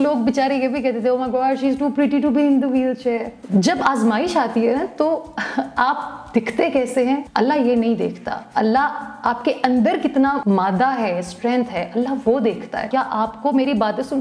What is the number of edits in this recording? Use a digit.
4